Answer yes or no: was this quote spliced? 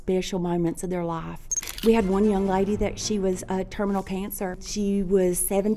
yes